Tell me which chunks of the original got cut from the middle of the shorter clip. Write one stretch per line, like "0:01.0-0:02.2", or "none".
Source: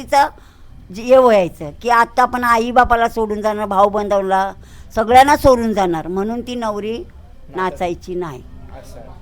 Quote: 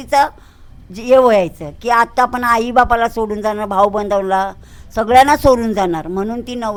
none